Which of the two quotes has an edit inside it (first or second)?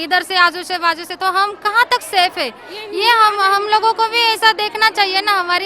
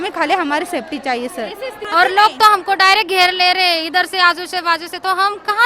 second